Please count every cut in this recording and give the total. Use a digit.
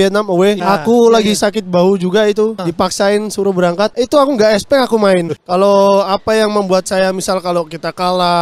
1